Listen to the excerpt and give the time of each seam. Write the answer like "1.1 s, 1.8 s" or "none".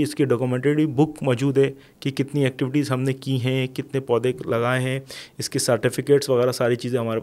none